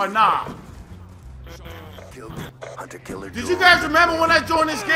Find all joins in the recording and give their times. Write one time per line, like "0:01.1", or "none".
0:02.5